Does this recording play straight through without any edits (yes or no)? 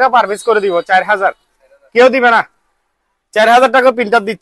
yes